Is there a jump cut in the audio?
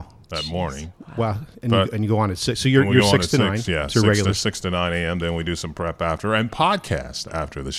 no; 0 cuts

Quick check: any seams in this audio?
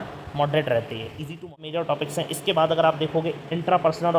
yes; 1 cut; at 1.5 s

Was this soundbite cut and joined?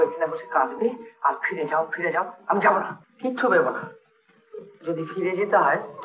yes; 1 cut; at 3.0 s

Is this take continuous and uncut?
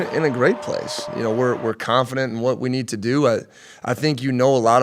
no; 1 cut; at 1.1 s

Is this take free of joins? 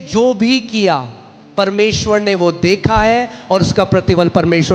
yes; 0 cuts

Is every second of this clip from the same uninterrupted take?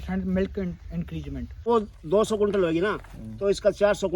no; 1 cut; at 1.7 s

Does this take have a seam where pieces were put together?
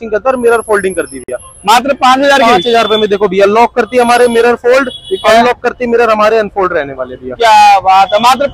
no; 0 cuts

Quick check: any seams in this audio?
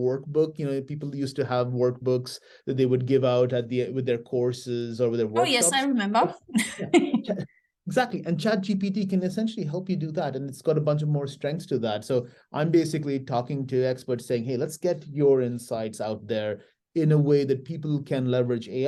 no; 0 cuts

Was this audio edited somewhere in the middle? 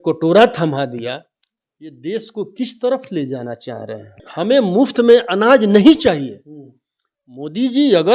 yes; 1 cut; at 4.2 s

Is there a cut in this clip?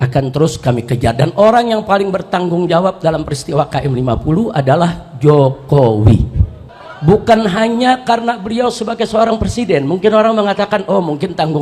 no; 0 cuts

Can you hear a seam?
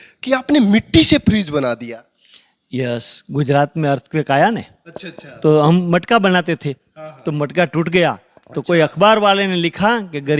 no; 0 cuts

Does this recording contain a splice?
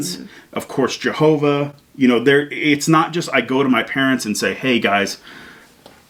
no; 0 cuts

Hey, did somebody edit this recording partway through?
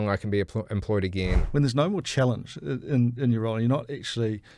yes; 1 cut; at 1.4 s

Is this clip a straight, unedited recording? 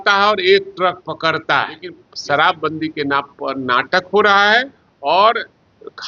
no; 1 cut; at 2.1 s

